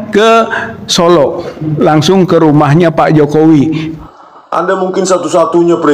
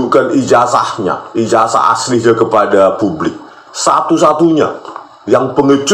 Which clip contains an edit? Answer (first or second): first